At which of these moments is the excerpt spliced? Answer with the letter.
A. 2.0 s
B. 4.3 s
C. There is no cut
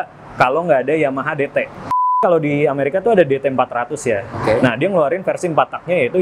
A